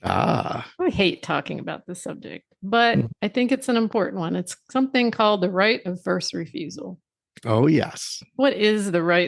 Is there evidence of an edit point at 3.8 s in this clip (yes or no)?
no